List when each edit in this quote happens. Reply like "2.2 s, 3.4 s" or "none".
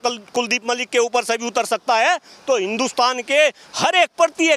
none